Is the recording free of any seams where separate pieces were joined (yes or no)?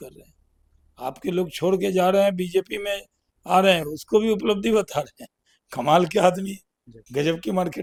yes